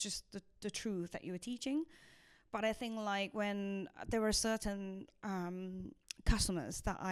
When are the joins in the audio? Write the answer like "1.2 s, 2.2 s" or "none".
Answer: none